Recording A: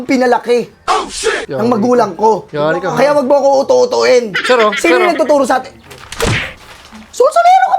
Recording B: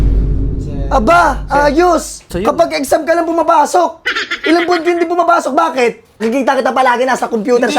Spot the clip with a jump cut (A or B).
B